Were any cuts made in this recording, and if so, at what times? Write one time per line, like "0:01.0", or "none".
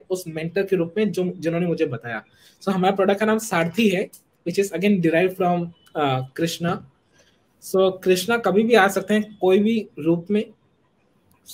none

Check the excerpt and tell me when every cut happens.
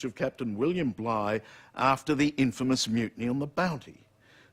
0:03.2

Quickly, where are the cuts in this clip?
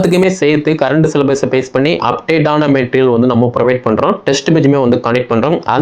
none

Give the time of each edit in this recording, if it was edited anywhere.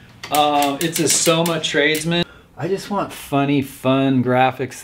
0:02.2

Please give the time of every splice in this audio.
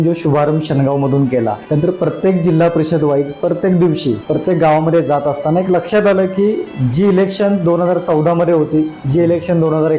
0:01.6
0:04.2

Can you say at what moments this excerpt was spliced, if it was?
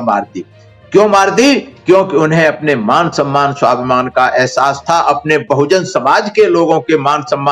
none

